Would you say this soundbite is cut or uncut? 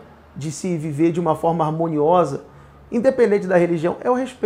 uncut